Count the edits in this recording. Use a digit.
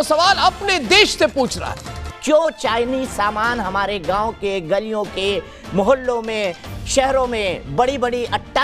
1